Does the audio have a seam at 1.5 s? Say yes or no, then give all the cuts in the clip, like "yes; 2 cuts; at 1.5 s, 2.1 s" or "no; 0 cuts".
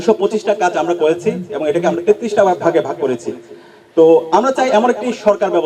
no; 0 cuts